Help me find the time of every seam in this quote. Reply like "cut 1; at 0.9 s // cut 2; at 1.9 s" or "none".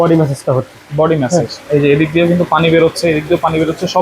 none